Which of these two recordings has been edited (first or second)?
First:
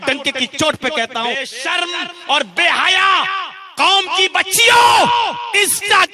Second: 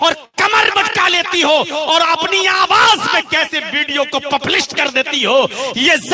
first